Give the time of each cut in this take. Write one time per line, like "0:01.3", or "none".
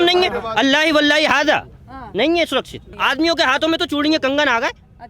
0:02.8